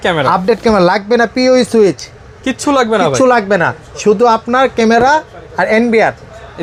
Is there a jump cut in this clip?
no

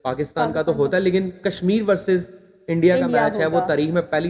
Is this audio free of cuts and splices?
yes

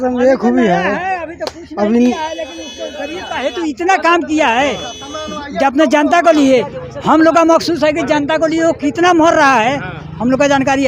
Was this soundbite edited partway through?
no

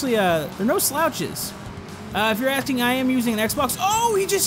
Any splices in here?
yes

